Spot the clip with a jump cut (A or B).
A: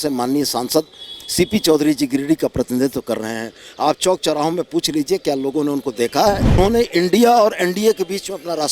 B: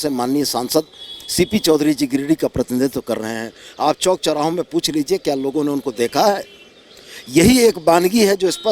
A